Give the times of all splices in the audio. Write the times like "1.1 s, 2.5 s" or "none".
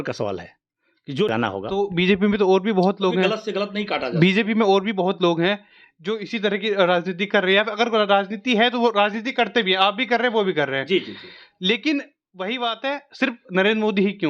1.3 s